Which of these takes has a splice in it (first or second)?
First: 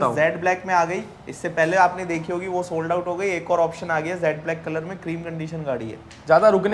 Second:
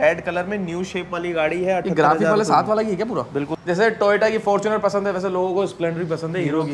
second